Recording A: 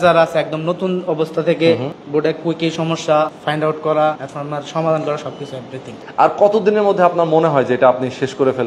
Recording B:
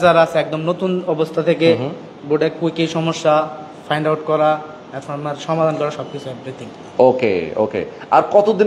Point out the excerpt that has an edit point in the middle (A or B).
A